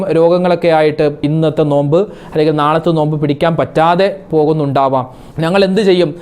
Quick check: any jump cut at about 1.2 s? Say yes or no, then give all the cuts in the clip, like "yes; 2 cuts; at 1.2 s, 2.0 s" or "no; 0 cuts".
yes; 1 cut; at 1.2 s